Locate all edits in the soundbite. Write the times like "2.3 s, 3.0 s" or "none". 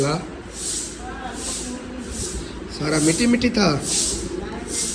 none